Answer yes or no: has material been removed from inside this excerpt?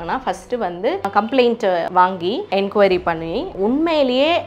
yes